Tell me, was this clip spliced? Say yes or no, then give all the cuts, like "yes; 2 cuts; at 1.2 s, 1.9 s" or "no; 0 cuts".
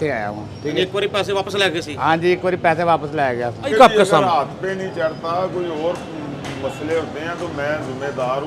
yes; 1 cut; at 3.7 s